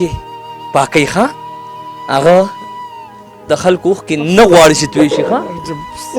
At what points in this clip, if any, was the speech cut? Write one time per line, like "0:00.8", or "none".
none